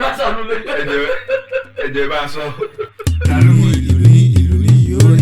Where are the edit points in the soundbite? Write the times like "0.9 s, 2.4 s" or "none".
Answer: 2.9 s